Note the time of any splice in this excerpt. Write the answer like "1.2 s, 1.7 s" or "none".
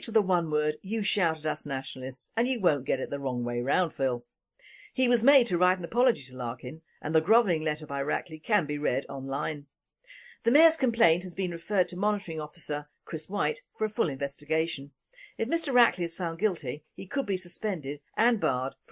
none